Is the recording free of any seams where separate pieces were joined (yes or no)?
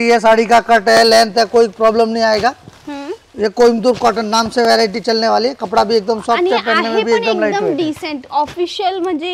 yes